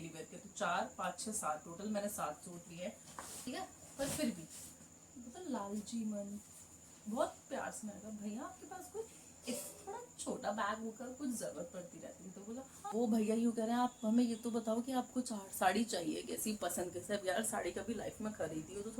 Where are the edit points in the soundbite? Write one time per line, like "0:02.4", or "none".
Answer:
0:03.5
0:12.8

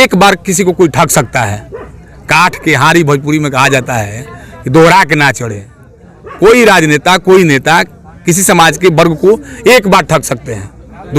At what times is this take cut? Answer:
none

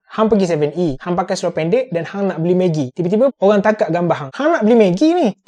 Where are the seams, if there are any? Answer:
0:03.4
0:04.3

